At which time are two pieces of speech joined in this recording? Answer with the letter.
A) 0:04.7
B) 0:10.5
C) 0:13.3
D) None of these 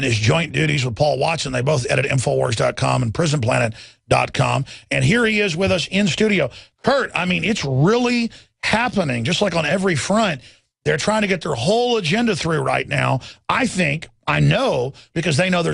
A